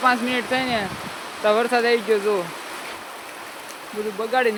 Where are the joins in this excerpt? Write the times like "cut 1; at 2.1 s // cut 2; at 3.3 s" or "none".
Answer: none